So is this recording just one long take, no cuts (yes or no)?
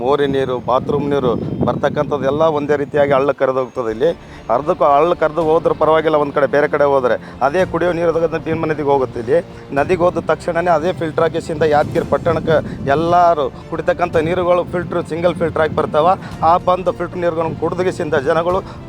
yes